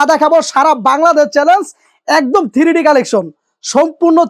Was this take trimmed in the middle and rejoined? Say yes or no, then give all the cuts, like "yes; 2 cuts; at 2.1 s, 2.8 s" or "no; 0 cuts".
no; 0 cuts